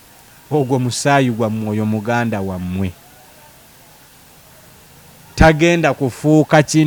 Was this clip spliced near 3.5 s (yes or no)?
no